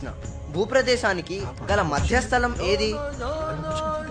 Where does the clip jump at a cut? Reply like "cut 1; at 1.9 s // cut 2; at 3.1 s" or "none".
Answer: none

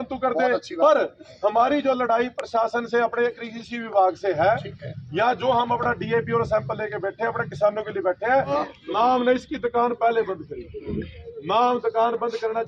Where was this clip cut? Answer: cut 1; at 8.7 s

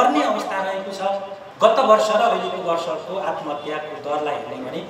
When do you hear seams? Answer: cut 1; at 1.4 s

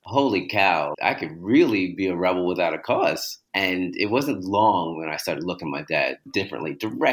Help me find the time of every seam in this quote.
cut 1; at 0.9 s // cut 2; at 3.3 s // cut 3; at 6.3 s

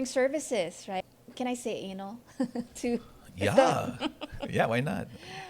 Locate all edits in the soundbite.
cut 1; at 1.0 s

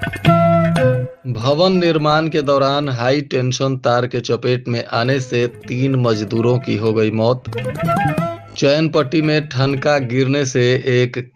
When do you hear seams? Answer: cut 1; at 1.2 s

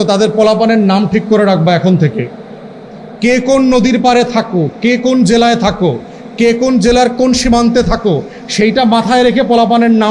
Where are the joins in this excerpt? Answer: none

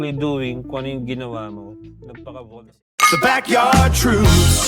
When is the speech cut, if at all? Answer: cut 1; at 2.7 s

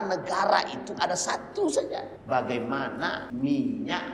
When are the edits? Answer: cut 1; at 2.1 s // cut 2; at 3.2 s

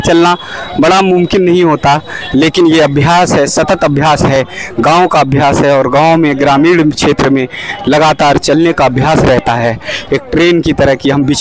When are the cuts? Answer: none

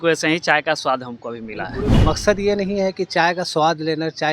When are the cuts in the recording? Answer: cut 1; at 2.0 s

